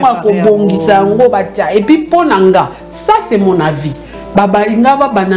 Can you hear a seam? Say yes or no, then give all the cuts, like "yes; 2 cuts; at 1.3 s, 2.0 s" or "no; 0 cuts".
no; 0 cuts